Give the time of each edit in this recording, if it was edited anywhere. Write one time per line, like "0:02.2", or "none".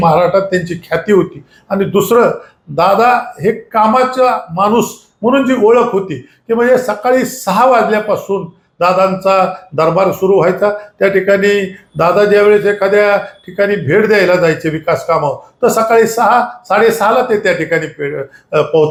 none